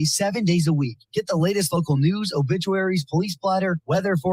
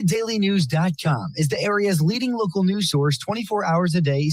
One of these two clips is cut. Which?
first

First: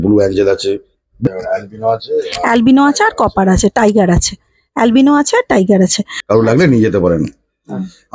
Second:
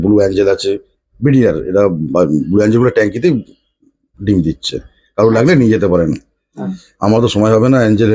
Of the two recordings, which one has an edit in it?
first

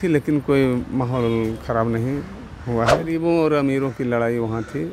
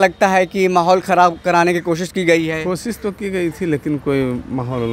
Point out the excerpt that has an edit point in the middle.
first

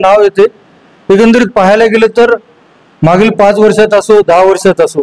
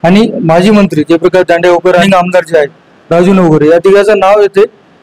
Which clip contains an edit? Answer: second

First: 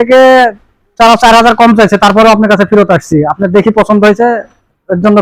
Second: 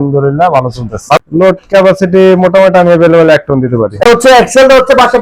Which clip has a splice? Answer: second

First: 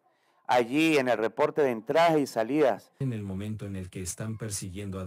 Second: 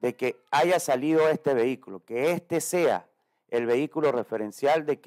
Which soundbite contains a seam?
first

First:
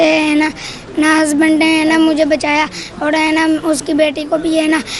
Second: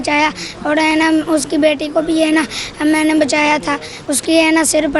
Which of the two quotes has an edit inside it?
second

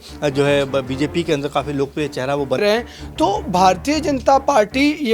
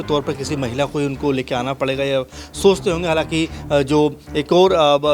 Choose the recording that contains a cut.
first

